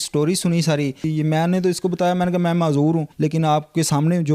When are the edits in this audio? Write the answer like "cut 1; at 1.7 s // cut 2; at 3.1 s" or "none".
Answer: cut 1; at 1.1 s // cut 2; at 3.1 s